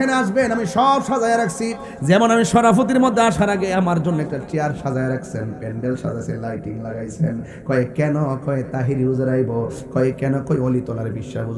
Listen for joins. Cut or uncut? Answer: uncut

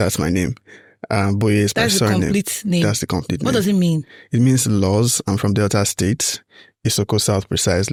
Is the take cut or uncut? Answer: uncut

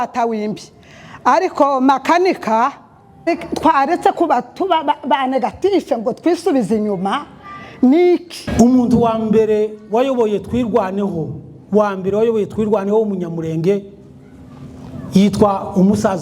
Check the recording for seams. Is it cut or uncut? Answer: cut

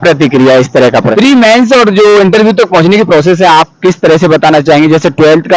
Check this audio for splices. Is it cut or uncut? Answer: cut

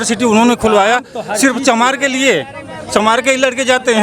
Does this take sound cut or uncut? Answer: uncut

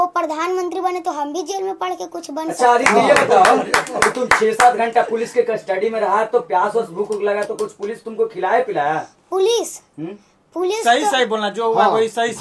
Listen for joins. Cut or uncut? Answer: uncut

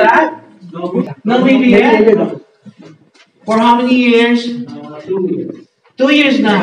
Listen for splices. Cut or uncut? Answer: cut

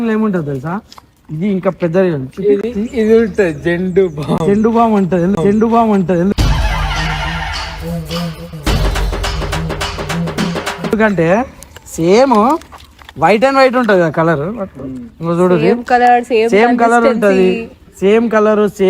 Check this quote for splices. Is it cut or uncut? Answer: uncut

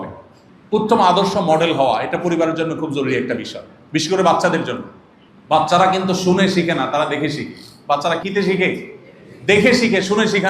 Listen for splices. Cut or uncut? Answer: cut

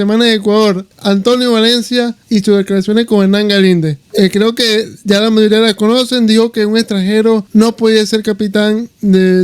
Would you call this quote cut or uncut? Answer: cut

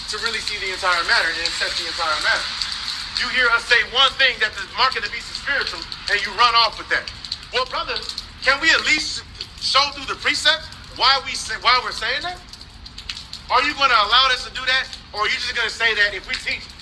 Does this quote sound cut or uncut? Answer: uncut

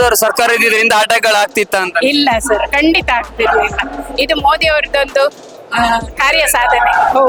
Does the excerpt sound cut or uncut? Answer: uncut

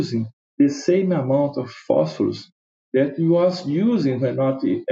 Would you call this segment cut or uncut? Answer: uncut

